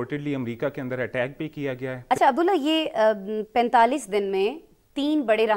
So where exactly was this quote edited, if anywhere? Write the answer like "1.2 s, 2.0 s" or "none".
2.0 s